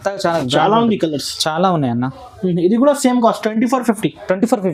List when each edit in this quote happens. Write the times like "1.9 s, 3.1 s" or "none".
none